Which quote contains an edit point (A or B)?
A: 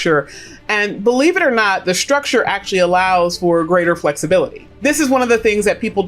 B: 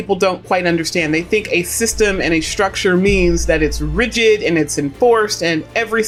A